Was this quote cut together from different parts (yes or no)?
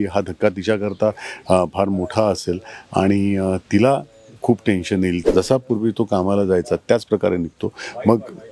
yes